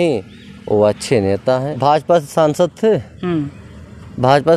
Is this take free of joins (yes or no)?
no